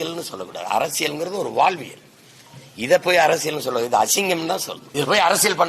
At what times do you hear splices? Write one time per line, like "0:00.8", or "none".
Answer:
0:04.8